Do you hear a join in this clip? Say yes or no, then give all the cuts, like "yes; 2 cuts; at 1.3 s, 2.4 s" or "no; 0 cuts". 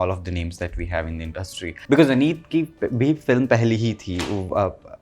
yes; 1 cut; at 1.8 s